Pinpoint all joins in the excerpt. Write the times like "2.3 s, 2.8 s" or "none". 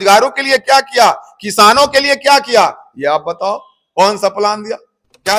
none